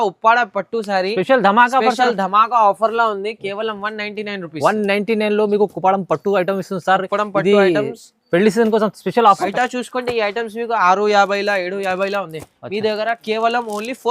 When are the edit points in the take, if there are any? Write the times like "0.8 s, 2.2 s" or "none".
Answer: 9.5 s